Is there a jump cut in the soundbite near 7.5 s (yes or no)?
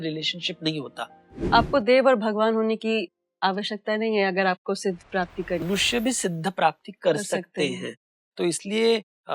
no